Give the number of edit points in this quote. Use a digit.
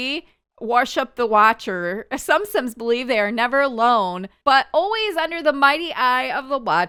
0